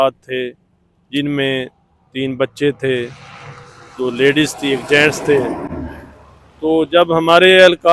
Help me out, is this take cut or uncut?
uncut